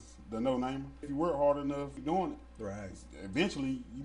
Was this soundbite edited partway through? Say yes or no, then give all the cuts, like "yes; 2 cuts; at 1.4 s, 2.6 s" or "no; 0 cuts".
yes; 2 cuts; at 1.1 s, 1.9 s